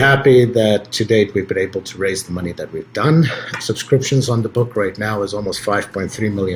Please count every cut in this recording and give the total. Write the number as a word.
one